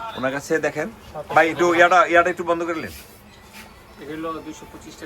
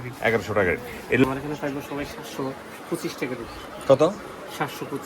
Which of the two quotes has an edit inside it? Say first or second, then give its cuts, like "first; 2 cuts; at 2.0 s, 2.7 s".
second; 1 cut; at 1.2 s